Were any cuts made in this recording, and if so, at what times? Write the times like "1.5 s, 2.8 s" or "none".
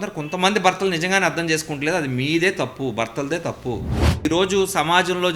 4.2 s